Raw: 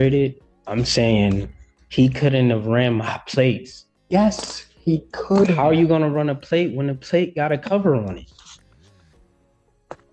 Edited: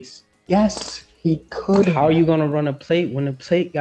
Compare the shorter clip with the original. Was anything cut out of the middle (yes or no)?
no